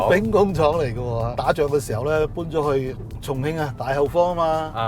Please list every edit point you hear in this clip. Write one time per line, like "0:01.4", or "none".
none